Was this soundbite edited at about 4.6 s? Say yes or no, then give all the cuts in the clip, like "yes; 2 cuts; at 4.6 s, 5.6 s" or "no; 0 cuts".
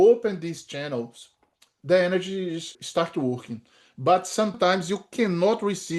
yes; 2 cuts; at 2.7 s, 4.6 s